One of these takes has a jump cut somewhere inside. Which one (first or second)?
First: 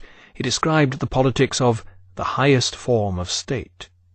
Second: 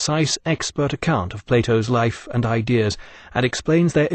second